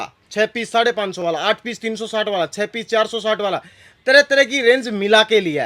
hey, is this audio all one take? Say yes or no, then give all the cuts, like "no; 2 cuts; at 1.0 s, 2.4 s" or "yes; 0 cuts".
yes; 0 cuts